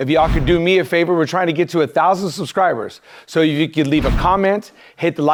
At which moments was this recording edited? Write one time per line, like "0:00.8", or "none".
none

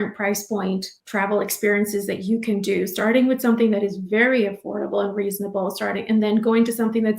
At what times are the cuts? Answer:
0:01.0

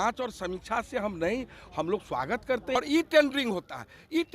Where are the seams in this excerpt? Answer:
0:02.8

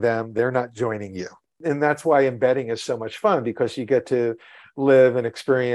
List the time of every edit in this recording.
0:01.6

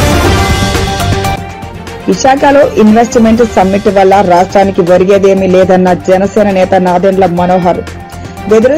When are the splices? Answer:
none

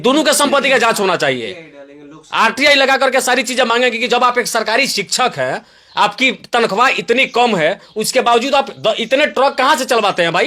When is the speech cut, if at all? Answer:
none

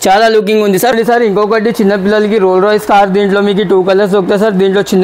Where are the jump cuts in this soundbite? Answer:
0:00.9

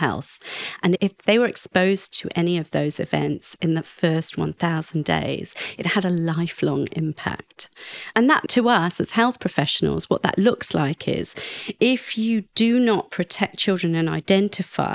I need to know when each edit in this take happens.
none

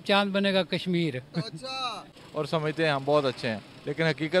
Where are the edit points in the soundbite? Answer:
0:02.2

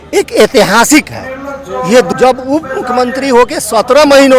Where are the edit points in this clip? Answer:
0:02.1

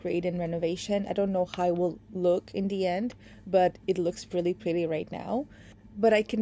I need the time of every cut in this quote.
none

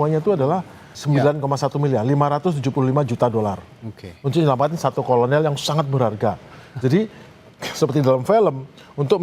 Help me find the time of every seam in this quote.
0:00.9

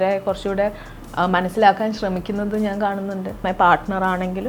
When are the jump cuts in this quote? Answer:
0:03.4

